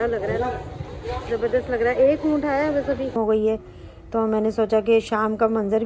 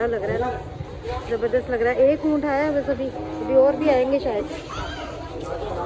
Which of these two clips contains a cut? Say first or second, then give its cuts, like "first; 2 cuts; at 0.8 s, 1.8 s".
first; 1 cut; at 3.1 s